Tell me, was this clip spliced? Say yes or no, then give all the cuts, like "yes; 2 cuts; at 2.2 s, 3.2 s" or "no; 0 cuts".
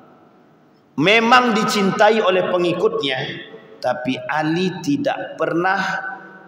no; 0 cuts